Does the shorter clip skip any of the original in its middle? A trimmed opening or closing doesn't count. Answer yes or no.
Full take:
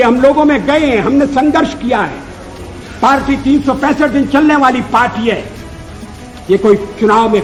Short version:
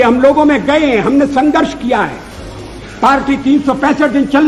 no